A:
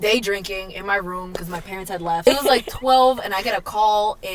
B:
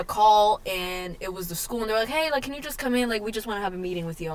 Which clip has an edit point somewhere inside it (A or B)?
A